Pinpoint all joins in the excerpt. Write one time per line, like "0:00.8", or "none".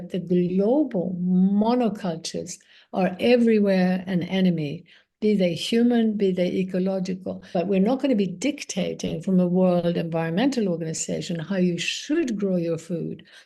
0:07.4

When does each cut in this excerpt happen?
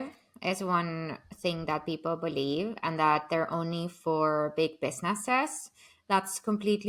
none

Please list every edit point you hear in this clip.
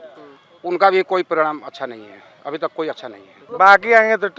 0:03.4

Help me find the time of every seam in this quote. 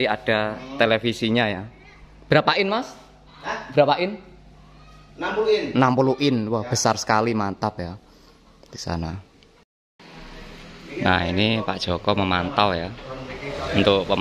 0:09.8

